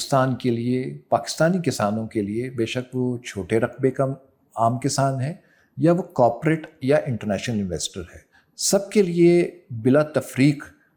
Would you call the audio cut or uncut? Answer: uncut